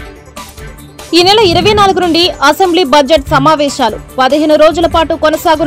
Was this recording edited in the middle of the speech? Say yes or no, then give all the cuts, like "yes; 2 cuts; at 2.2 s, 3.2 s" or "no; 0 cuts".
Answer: yes; 1 cut; at 1.1 s